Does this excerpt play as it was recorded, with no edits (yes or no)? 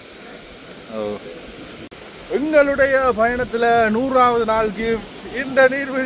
no